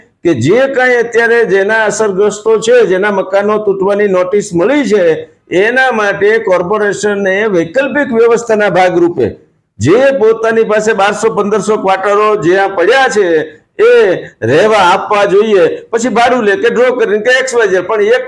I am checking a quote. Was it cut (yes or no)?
no